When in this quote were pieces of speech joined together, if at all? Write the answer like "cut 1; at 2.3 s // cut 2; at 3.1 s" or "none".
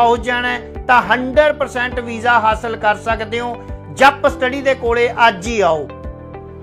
none